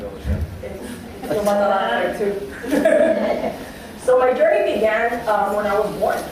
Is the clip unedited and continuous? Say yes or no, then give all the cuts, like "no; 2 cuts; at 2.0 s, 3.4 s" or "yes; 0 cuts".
no; 1 cut; at 1.8 s